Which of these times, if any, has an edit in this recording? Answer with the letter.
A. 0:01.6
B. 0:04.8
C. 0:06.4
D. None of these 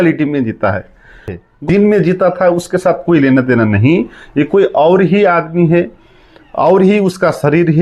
A